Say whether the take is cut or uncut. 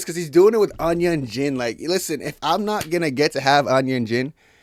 uncut